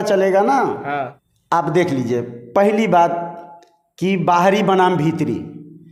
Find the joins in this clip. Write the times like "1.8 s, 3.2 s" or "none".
none